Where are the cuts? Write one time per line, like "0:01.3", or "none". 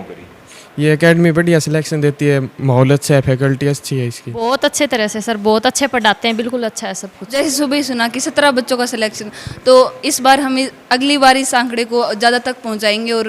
0:04.4
0:07.4